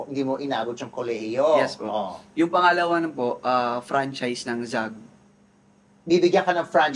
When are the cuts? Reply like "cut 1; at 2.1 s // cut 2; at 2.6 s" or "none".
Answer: none